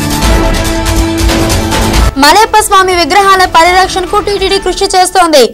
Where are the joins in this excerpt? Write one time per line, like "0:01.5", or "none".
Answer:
0:02.0